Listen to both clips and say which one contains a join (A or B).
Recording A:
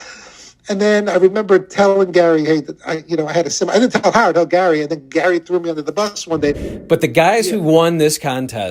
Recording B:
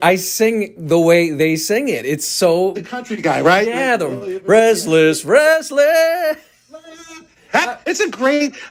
A